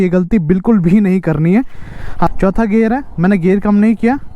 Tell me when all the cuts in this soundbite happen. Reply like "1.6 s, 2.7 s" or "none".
2.3 s

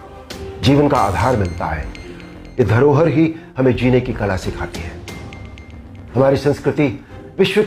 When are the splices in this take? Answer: 4.7 s, 6.1 s

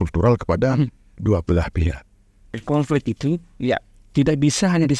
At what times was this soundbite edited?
2.6 s

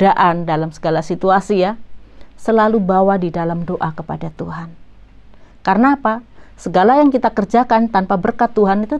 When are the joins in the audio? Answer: none

